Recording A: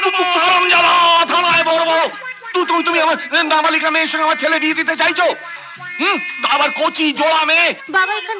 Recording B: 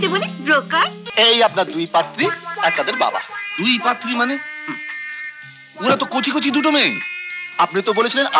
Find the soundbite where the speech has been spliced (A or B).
B